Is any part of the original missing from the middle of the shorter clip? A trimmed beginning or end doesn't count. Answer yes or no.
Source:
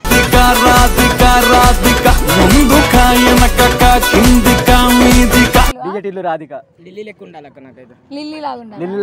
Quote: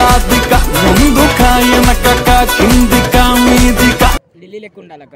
yes